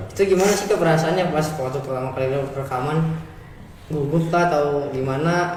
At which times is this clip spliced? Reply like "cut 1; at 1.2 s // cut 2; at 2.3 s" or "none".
none